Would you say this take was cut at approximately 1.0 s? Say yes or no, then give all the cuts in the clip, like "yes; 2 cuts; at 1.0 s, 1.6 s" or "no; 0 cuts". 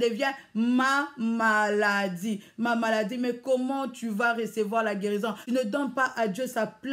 no; 1 cut; at 5.6 s